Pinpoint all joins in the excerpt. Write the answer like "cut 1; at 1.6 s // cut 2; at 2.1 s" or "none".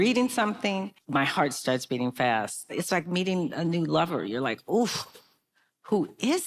cut 1; at 1.0 s // cut 2; at 2.6 s

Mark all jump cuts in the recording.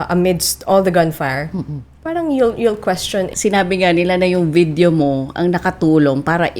cut 1; at 3.3 s

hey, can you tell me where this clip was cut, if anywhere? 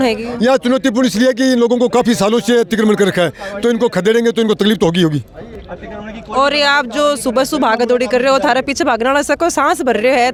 none

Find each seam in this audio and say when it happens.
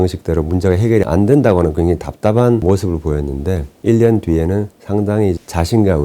cut 1; at 1.1 s // cut 2; at 2.6 s // cut 3; at 3.7 s // cut 4; at 4.8 s

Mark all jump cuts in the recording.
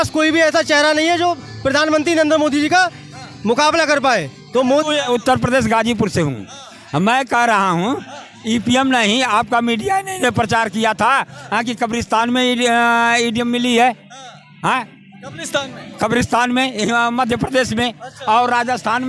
cut 1; at 4.8 s

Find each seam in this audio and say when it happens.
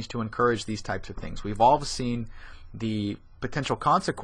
cut 1; at 3.3 s

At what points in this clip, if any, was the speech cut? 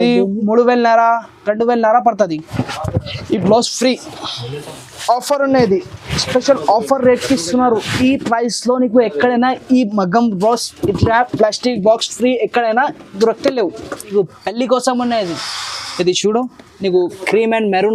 cut 1; at 2.5 s // cut 2; at 14.1 s

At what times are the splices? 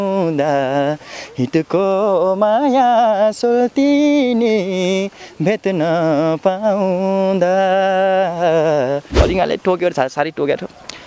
cut 1; at 9.1 s

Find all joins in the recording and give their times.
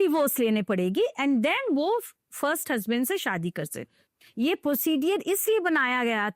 cut 1; at 3.9 s

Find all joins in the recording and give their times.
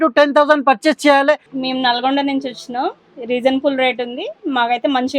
cut 1; at 1.5 s

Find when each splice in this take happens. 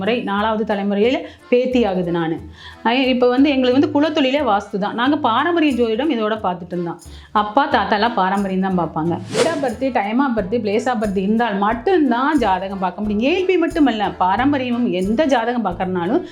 cut 1; at 9.4 s

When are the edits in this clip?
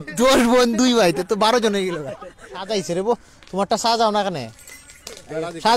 cut 1; at 2.5 s

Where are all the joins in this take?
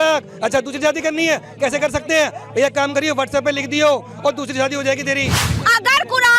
cut 1; at 5.4 s

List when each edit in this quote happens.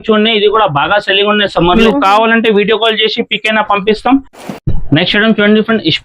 cut 1; at 1.8 s // cut 2; at 4.4 s

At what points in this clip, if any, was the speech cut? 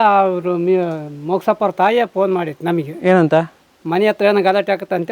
none

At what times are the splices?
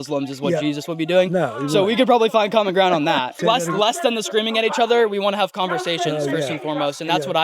cut 1; at 3.4 s

